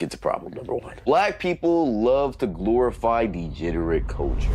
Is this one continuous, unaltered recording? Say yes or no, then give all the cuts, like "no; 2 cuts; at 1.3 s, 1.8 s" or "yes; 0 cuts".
no; 1 cut; at 0.9 s